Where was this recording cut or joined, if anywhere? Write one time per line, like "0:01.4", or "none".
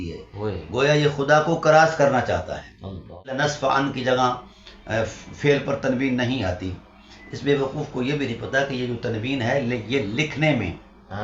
0:03.3